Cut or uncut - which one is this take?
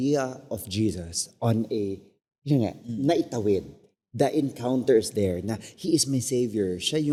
uncut